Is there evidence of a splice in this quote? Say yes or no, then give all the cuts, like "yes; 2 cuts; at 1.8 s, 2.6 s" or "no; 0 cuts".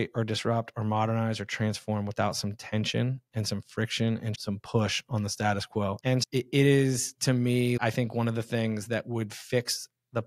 yes; 1 cut; at 6.0 s